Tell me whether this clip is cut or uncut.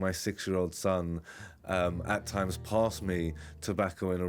uncut